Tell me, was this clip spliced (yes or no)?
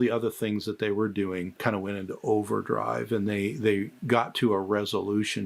yes